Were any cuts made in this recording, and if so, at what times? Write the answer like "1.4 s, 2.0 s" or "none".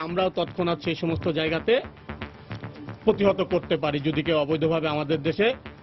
none